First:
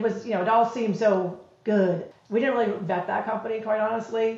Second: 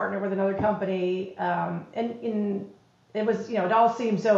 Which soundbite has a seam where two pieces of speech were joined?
first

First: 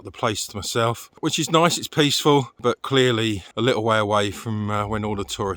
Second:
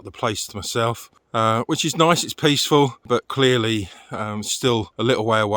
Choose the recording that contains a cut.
first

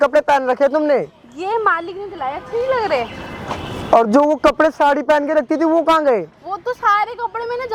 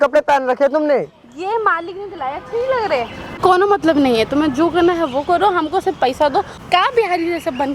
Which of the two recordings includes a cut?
second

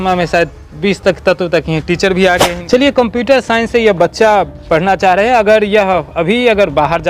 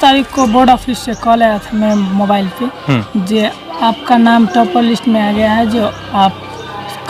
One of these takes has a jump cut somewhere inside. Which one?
first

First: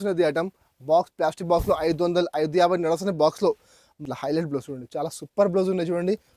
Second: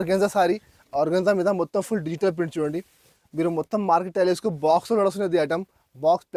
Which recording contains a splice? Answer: first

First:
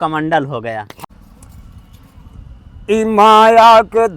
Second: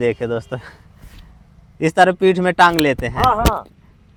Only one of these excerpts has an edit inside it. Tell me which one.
first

